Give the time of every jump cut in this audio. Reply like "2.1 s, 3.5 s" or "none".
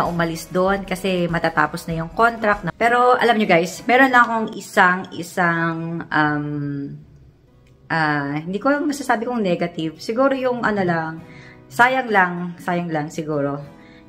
2.7 s